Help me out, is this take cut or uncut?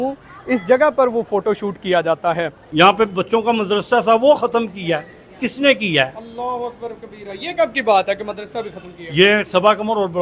cut